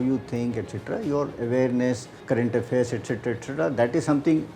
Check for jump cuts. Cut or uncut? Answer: cut